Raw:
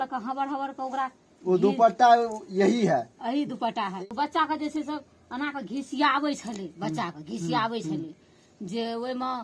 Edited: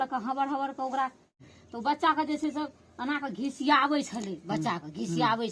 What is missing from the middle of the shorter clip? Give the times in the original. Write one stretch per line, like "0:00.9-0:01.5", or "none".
0:01.4-0:03.7

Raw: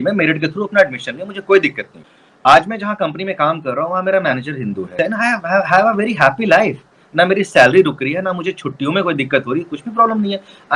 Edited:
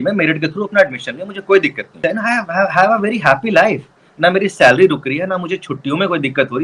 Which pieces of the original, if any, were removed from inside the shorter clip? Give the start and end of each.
0:01.9-0:04.8

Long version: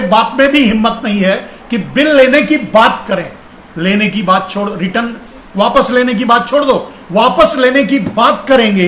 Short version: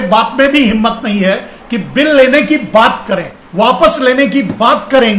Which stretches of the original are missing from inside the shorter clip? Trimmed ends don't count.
0:03.4-0:07.0

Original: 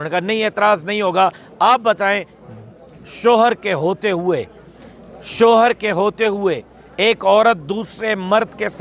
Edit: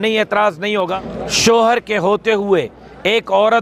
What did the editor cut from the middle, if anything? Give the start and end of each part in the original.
0:01.2-0:04.8

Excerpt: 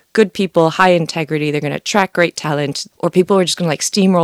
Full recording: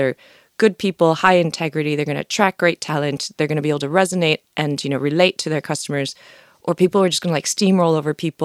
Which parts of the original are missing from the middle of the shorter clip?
0:03.2-0:06.4

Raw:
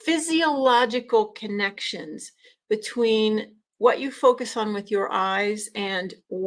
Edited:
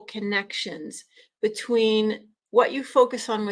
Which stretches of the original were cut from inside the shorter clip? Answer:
none

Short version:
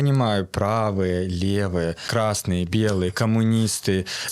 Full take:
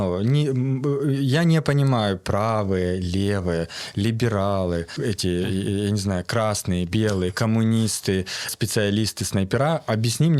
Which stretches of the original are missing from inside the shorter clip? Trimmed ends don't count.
0:03.8-0:06.3

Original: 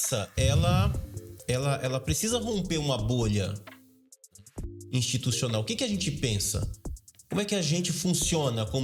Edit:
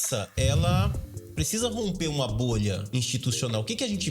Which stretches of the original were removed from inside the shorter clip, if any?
0:01.4-0:02.1
0:03.5-0:04.8

